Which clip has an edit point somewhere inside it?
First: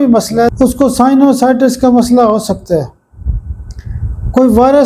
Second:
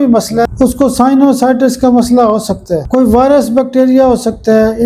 second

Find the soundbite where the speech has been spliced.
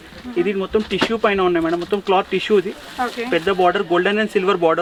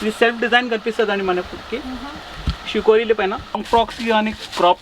second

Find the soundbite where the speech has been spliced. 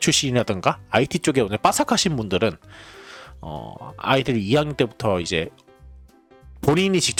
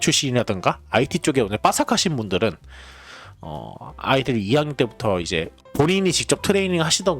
second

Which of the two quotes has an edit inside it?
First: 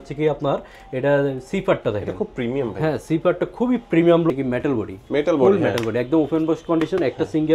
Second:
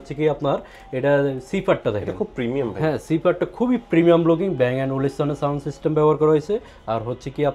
first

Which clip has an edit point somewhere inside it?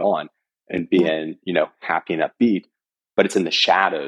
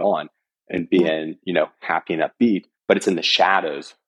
second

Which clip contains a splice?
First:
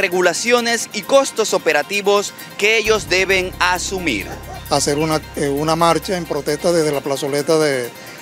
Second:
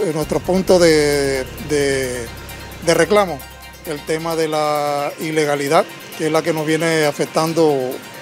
first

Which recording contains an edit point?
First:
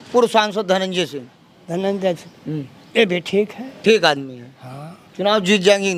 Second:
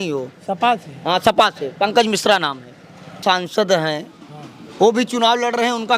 second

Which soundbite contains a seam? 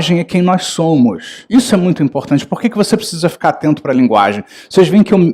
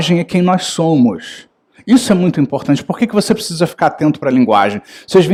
first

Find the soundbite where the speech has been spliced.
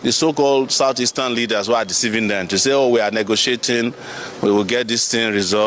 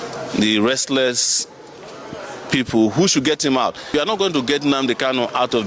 second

